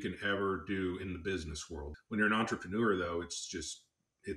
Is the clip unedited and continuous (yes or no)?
no